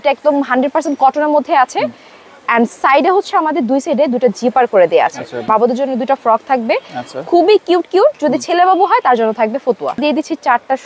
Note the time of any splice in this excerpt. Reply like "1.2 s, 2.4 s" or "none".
5.5 s, 10.0 s